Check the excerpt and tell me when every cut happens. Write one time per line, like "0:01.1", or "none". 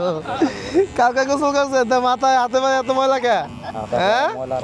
none